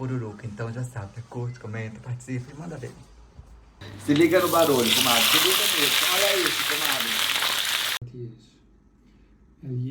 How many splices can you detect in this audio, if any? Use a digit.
2